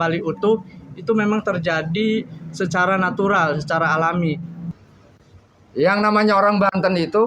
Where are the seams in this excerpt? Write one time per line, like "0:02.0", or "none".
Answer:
0:04.6